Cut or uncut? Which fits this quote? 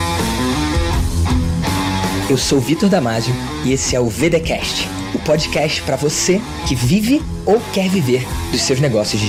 uncut